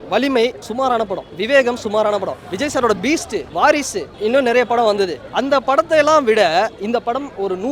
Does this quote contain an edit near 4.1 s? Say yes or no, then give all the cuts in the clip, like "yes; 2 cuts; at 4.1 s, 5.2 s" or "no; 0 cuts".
yes; 5 cuts; at 0.9 s, 2.4 s, 3.5 s, 4.1 s, 5.2 s